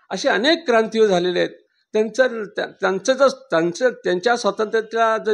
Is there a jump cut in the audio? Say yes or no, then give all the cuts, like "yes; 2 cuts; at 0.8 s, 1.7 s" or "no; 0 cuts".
no; 0 cuts